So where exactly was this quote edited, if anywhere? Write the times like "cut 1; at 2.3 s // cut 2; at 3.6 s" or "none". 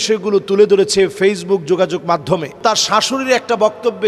cut 1; at 2.6 s